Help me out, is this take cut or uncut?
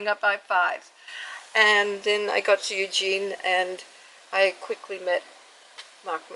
uncut